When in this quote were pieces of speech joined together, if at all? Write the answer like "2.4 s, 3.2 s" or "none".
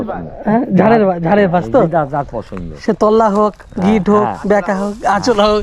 none